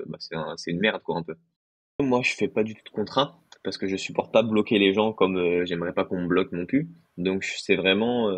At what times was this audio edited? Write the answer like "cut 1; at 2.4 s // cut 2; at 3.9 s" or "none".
cut 1; at 2.0 s